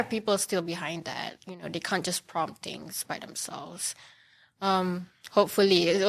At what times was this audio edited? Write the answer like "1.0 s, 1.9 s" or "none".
none